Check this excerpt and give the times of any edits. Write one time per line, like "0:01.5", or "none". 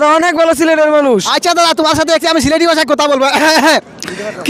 none